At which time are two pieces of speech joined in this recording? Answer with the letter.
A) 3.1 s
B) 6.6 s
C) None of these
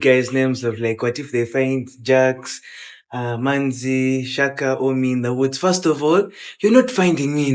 C